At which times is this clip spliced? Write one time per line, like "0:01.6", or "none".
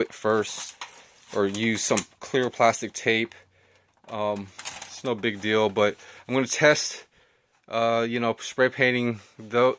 none